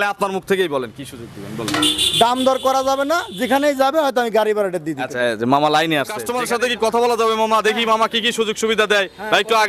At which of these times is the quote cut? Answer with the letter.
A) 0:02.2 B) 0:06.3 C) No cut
B